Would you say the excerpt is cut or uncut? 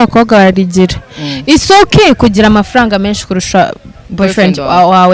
uncut